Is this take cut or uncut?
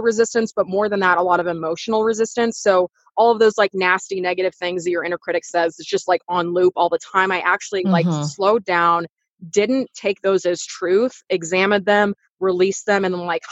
uncut